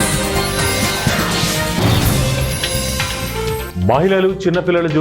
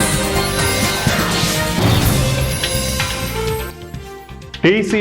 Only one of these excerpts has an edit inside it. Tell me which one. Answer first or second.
first